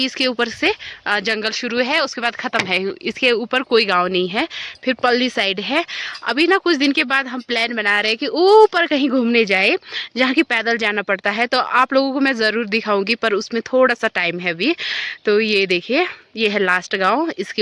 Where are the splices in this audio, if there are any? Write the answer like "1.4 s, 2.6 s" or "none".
none